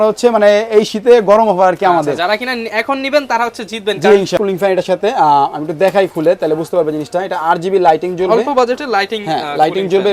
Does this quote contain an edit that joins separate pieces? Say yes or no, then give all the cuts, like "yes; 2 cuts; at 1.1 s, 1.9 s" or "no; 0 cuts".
yes; 1 cut; at 4.4 s